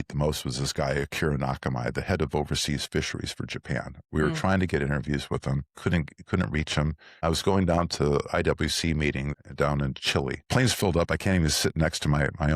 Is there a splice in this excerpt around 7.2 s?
yes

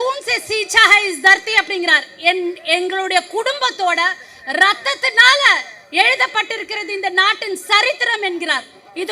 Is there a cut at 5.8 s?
no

